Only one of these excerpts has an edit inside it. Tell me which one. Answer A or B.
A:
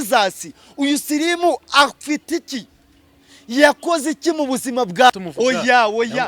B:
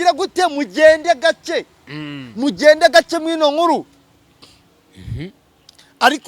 A